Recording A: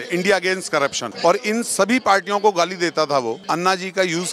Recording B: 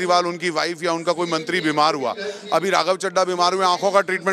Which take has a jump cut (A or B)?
A